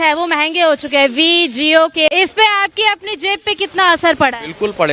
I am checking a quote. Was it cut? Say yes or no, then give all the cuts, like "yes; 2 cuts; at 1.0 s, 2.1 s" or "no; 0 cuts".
yes; 1 cut; at 2.1 s